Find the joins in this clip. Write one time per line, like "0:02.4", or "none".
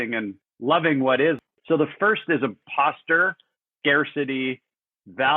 0:01.5
0:02.6